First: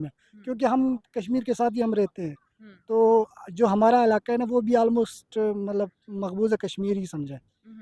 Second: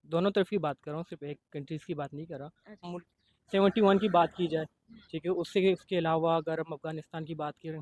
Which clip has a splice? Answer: second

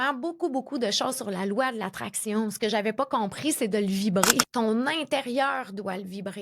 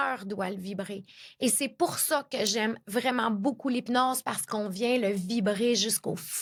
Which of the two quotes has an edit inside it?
first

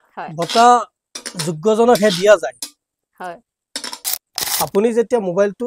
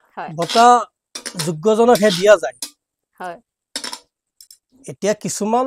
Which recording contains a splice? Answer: first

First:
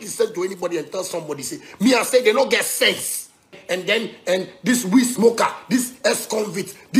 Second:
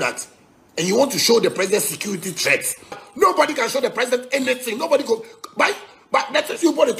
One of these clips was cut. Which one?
first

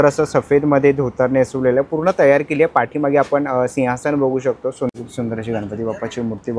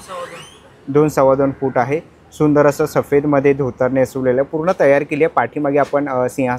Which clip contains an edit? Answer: first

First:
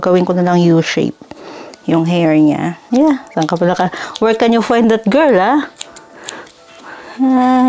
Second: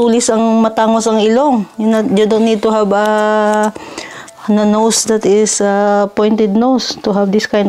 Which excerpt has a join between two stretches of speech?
first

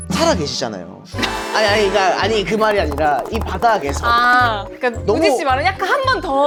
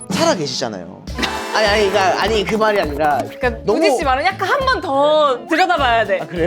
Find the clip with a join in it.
second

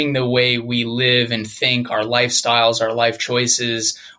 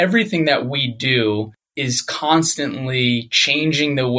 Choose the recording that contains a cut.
second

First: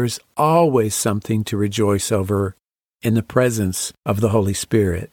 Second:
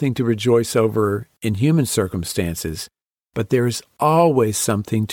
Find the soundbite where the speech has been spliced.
first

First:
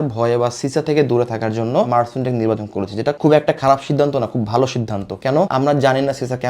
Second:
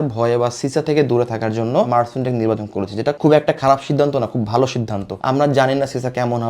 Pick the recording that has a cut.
second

